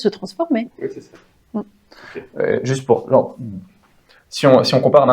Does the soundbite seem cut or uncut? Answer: uncut